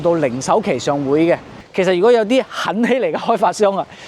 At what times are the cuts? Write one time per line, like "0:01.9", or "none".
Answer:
0:01.6